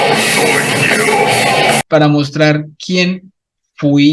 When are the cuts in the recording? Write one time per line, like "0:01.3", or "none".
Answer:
0:01.8